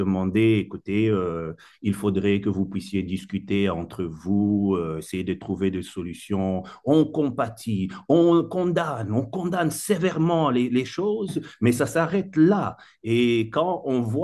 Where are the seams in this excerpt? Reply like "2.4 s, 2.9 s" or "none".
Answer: none